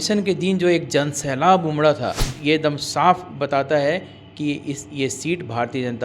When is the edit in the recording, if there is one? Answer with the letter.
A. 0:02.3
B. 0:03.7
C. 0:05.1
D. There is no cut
A